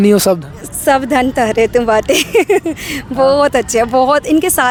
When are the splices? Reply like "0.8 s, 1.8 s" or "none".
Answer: none